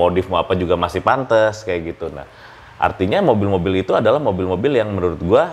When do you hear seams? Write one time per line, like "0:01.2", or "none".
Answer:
none